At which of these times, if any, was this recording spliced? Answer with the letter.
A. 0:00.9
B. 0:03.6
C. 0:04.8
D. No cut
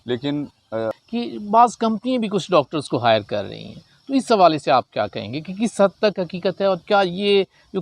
A